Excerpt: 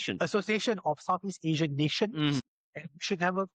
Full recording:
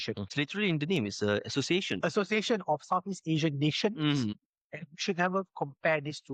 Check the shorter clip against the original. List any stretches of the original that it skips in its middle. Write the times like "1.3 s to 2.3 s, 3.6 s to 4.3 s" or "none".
4.2 s to 4.4 s